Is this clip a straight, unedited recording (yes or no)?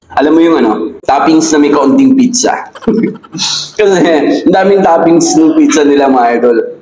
no